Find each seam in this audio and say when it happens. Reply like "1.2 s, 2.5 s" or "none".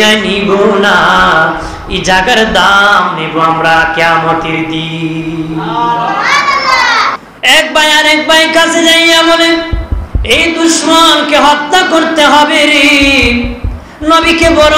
7.2 s